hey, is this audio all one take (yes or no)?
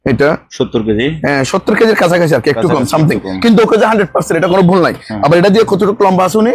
yes